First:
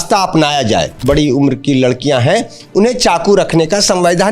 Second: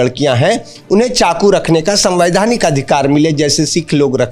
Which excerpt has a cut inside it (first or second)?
first